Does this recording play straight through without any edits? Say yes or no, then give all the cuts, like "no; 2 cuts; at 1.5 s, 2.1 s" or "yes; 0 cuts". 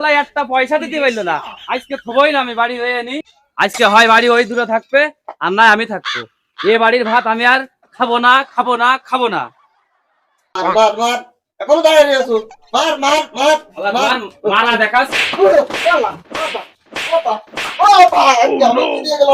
no; 1 cut; at 10.4 s